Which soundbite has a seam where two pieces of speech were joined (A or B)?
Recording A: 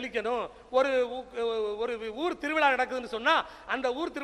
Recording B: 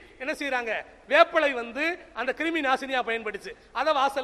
B